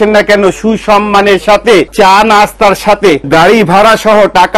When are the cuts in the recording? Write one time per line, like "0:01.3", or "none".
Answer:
0:01.9
0:03.2